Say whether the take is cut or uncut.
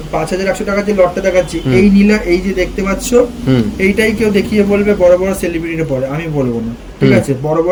uncut